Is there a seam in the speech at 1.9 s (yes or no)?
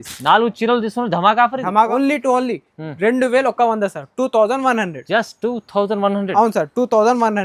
yes